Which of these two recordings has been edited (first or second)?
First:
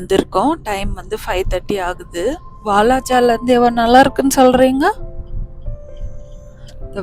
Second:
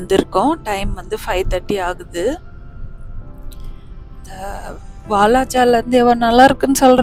first